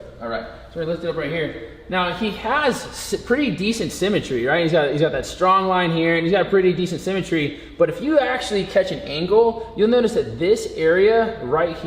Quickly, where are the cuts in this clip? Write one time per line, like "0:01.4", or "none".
none